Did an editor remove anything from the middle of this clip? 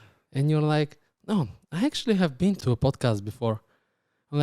yes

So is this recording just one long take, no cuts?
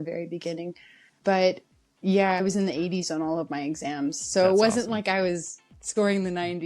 no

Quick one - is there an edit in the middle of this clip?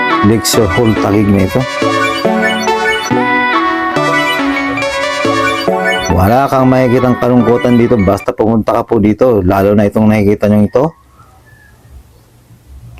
no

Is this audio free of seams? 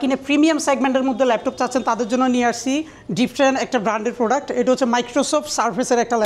yes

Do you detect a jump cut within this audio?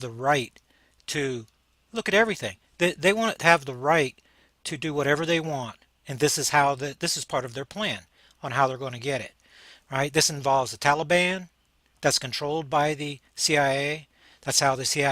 yes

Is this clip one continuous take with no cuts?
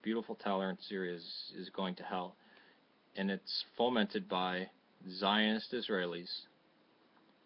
yes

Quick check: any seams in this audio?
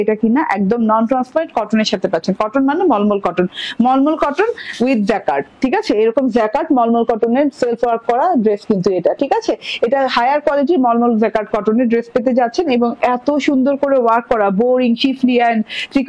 yes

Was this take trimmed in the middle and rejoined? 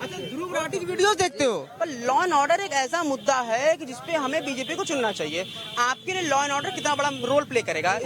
yes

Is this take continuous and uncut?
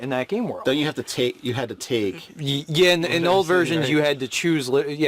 yes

